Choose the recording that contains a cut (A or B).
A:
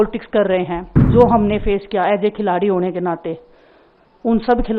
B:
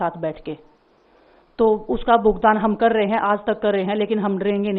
A